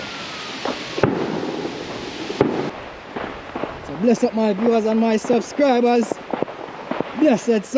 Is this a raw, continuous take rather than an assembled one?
no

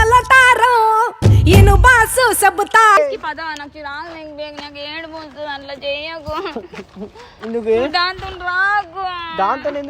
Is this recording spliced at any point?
yes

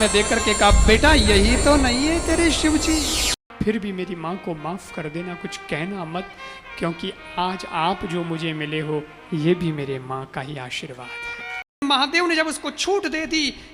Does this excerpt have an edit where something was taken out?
yes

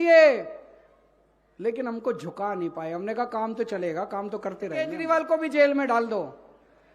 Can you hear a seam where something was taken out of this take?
yes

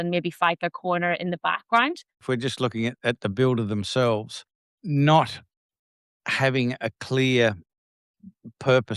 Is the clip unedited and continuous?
no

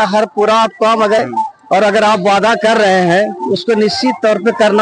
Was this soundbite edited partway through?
yes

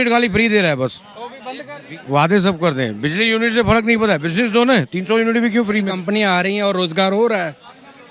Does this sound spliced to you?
yes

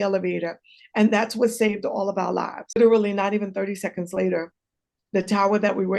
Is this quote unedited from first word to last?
no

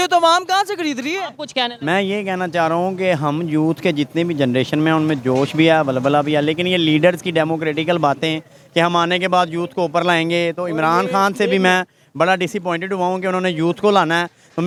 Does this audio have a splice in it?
no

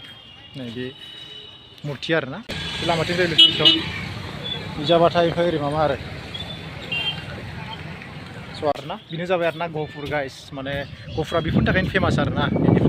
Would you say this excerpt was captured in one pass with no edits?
no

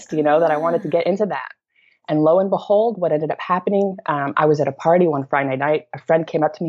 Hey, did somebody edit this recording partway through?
no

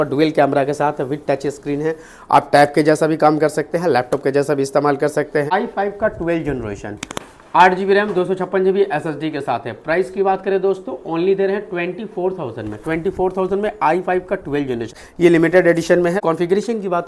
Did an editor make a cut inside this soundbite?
yes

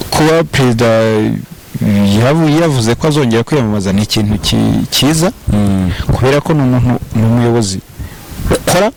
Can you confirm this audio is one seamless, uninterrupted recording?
yes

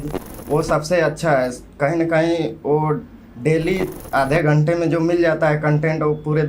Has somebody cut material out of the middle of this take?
no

